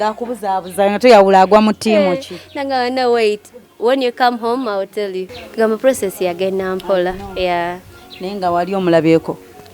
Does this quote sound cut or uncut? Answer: cut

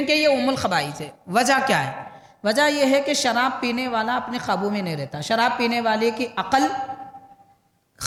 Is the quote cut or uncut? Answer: uncut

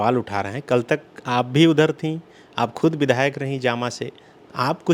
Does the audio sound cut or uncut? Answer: uncut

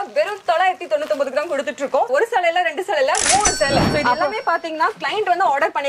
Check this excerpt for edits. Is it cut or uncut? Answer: cut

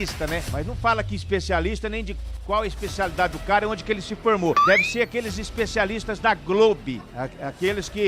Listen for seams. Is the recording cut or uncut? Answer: uncut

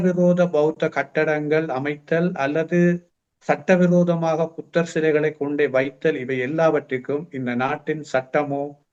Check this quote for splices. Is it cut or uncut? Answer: uncut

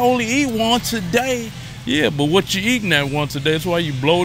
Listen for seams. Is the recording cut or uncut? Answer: uncut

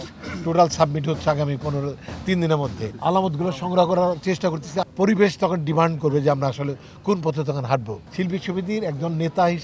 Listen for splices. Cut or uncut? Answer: cut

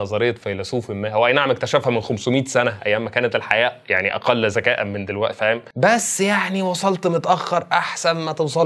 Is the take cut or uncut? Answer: uncut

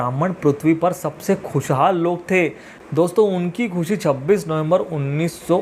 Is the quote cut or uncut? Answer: cut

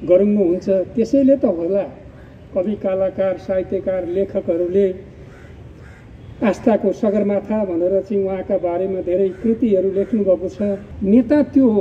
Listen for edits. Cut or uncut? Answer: cut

